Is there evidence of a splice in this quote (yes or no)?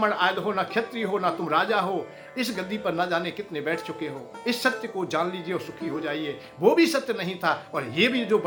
no